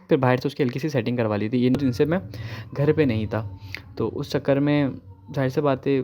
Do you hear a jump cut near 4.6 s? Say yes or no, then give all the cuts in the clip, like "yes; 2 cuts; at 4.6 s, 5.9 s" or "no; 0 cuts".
no; 1 cut; at 1.7 s